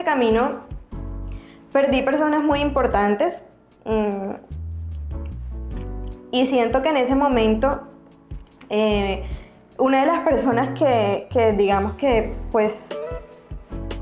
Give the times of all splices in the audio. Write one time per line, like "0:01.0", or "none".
none

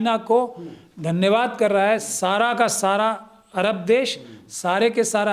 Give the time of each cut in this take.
none

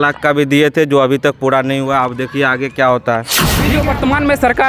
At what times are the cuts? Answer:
0:03.6

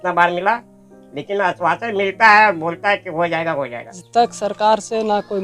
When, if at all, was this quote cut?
0:04.0

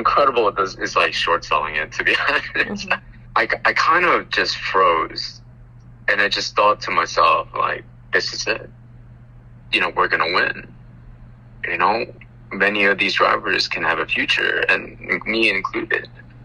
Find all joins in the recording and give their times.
none

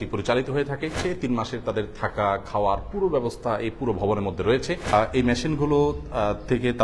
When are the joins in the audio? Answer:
0:01.0
0:04.9

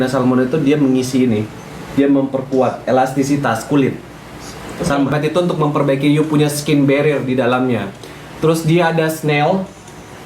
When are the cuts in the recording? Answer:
0:05.1

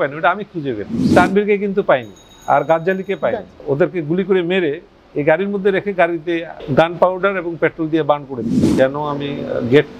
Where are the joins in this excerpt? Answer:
0:01.1
0:03.5
0:06.6
0:08.6

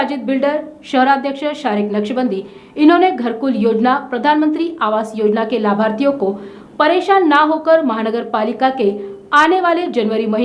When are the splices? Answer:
none

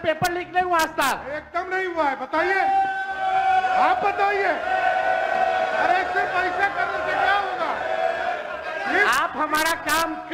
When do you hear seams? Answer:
none

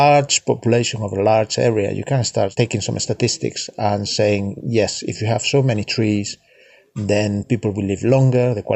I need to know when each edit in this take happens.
0:02.5

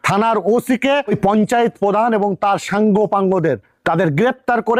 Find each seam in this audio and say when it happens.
none

